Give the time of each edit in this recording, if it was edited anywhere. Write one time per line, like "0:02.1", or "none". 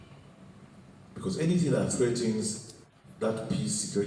none

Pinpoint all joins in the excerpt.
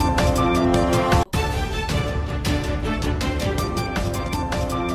none

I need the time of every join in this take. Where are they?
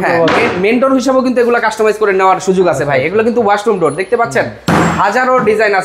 none

